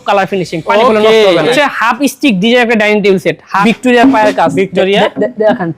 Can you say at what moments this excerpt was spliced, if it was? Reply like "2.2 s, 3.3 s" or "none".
1.5 s, 3.6 s